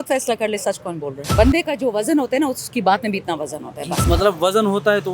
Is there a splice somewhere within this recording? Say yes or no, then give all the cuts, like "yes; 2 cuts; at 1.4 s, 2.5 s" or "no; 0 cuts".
yes; 2 cuts; at 1.2 s, 4.0 s